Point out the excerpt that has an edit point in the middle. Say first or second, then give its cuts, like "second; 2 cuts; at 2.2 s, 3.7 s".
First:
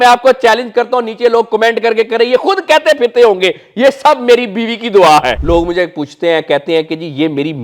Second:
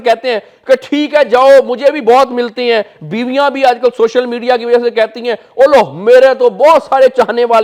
first; 1 cut; at 5.4 s